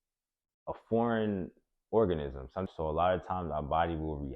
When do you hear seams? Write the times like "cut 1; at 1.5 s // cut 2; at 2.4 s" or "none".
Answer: cut 1; at 2.7 s